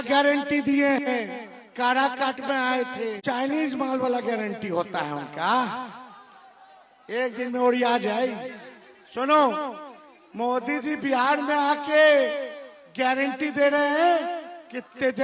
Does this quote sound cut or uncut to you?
cut